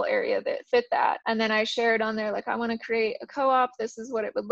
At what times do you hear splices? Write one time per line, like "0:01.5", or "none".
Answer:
0:01.2